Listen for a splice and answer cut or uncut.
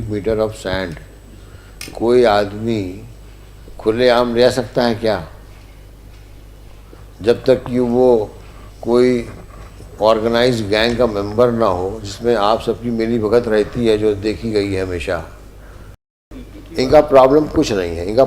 cut